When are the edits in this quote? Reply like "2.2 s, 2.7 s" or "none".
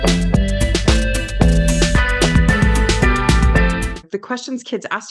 1.8 s, 3.9 s